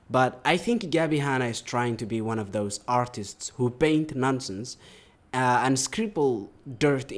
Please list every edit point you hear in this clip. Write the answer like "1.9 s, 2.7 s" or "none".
none